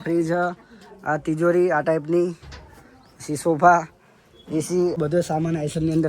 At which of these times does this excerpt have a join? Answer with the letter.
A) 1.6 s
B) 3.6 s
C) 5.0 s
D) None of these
C